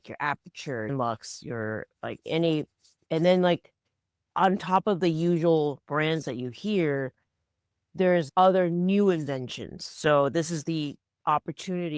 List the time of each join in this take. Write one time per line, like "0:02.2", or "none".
0:00.9
0:08.3